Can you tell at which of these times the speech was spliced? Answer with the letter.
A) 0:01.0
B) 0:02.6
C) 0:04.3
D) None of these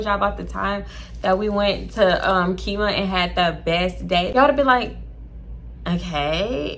C